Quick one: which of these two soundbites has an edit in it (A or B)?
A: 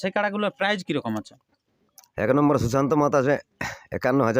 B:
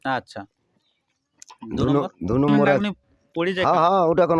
B